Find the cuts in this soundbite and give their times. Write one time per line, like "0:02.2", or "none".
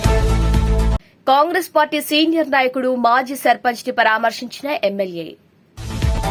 none